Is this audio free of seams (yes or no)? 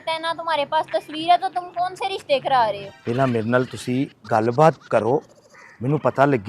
no